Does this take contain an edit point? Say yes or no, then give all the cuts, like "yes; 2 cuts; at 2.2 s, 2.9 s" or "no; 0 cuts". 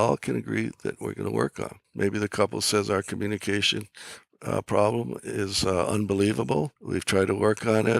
yes; 2 cuts; at 1.8 s, 6.8 s